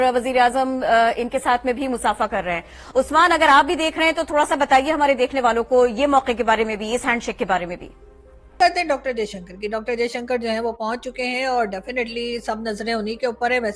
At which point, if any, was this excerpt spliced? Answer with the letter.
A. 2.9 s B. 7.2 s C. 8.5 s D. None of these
C